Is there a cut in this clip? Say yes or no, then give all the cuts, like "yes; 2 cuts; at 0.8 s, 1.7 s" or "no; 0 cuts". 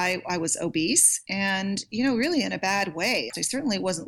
yes; 2 cuts; at 1.2 s, 3.3 s